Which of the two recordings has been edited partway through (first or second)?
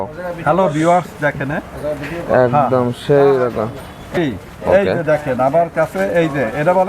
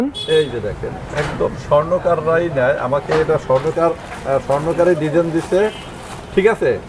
first